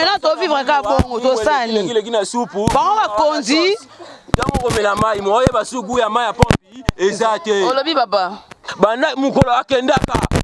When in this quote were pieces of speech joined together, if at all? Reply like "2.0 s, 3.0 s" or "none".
8.6 s